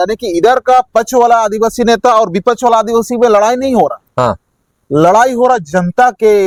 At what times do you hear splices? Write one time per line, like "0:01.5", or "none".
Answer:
none

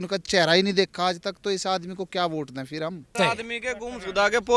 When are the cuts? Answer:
0:03.1

